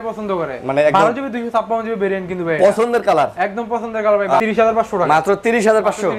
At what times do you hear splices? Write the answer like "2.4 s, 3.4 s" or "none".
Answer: 4.4 s